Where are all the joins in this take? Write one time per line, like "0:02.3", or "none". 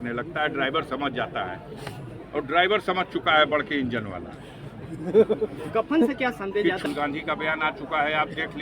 0:06.8

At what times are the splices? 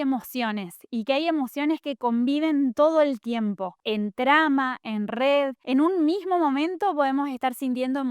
0:03.7
0:05.6

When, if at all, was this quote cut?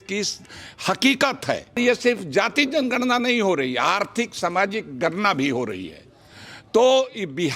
0:01.8

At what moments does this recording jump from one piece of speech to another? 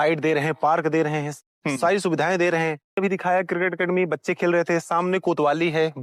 0:03.0

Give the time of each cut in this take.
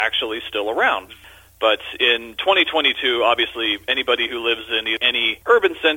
0:01.0
0:04.9

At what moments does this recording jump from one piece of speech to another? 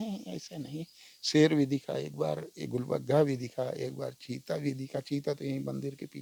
none

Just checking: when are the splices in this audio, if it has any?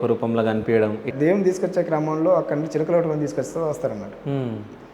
0:01.1

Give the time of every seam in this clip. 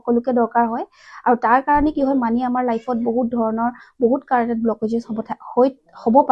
none

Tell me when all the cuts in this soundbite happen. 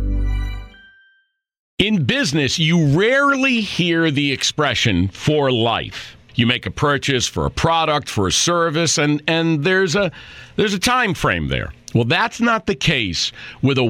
0:01.6

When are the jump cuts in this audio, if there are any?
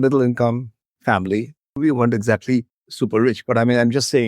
0:02.8

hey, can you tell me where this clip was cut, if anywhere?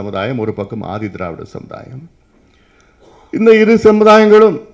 none

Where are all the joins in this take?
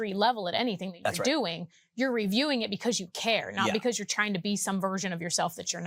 none

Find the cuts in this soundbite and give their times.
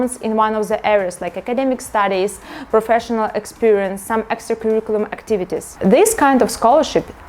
none

